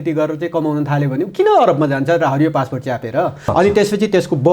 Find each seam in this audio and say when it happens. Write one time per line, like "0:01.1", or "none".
0:03.4